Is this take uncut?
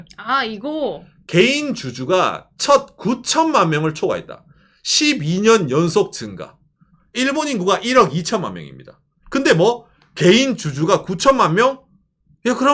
yes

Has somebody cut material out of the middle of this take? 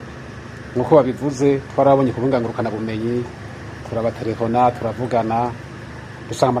no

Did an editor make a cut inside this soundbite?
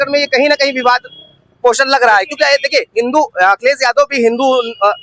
no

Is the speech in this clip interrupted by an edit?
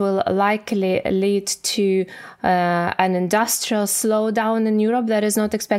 no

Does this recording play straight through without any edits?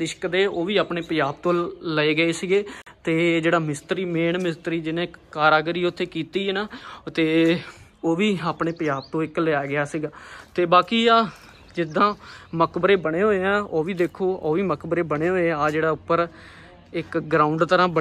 yes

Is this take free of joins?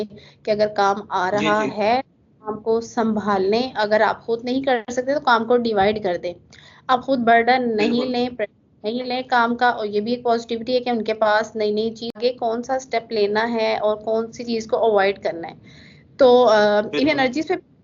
no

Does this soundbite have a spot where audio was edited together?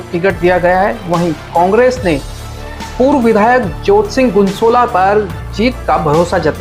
no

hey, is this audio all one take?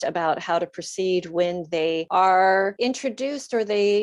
no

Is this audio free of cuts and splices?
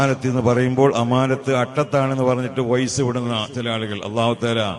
yes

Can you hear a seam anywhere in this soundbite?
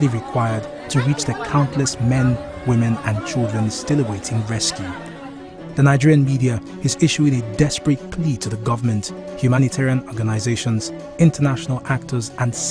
no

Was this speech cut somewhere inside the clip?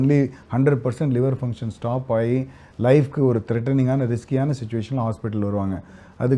no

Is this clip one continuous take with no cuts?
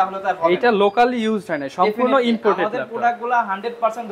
yes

